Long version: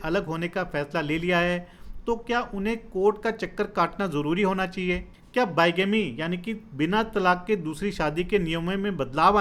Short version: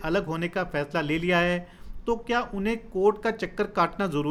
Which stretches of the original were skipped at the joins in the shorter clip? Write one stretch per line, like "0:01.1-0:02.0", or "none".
none